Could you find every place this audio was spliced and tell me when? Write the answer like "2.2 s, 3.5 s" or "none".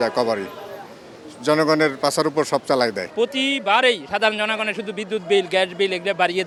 none